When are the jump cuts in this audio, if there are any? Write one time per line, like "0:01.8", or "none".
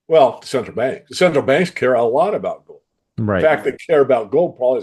0:01.0